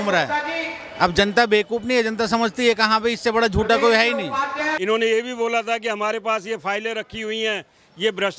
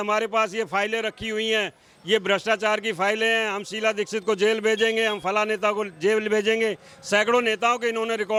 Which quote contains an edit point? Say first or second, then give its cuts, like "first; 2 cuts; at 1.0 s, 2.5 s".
first; 1 cut; at 4.7 s